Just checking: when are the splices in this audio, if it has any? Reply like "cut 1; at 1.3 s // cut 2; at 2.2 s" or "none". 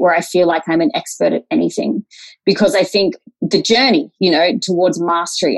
cut 1; at 3.3 s // cut 2; at 4.6 s